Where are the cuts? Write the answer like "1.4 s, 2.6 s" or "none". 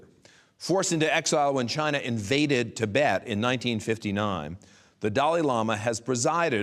none